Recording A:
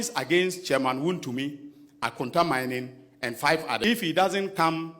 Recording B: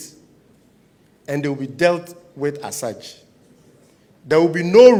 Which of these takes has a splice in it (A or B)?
A